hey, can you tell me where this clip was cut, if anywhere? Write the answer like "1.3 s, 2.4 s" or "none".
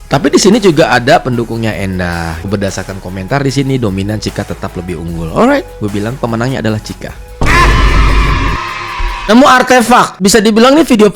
2.5 s, 9.3 s, 10.1 s